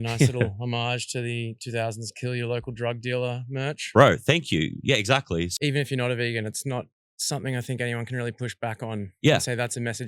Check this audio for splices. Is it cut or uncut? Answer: cut